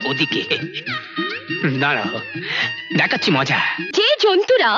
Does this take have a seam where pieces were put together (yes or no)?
yes